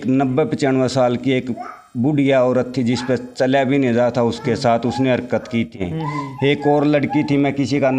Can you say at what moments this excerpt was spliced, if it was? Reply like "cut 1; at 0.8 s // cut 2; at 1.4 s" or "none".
cut 1; at 5.8 s